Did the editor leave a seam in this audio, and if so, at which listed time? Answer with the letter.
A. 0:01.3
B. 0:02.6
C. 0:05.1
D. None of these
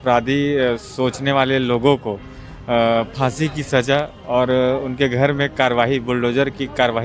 D